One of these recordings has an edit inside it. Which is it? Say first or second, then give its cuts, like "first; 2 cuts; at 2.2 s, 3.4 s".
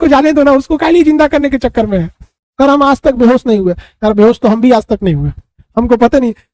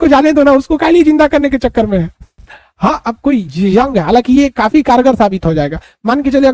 first; 1 cut; at 2.4 s